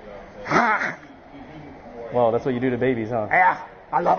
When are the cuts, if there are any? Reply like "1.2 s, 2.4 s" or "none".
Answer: 3.3 s